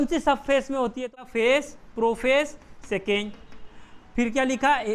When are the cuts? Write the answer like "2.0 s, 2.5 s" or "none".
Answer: 1.1 s